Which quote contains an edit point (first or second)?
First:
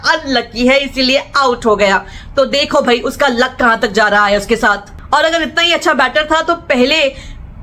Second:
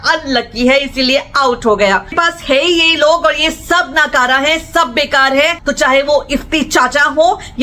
second